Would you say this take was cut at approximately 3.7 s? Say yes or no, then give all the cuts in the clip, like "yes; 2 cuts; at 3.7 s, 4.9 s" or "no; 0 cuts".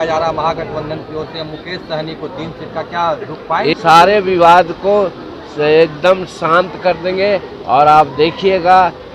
yes; 1 cut; at 3.7 s